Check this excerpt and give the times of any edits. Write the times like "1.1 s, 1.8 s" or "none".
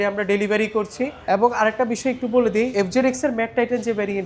1.2 s, 2.7 s